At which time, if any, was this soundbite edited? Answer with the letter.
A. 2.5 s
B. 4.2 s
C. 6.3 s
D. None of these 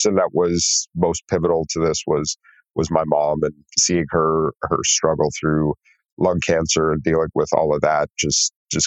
D